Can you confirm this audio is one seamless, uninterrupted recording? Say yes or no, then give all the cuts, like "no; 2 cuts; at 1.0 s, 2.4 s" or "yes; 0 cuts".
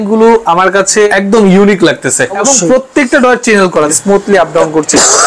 no; 3 cuts; at 1.1 s, 2.4 s, 3.9 s